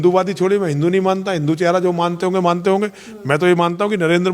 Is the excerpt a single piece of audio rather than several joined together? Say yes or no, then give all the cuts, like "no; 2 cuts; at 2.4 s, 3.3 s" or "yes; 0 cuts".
yes; 0 cuts